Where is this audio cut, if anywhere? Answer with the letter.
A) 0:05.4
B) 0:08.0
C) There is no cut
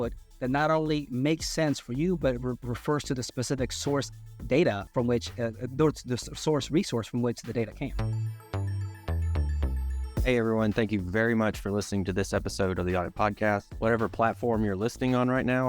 B